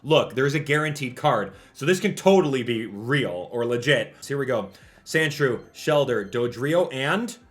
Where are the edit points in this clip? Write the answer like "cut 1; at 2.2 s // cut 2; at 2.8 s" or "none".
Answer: cut 1; at 4.2 s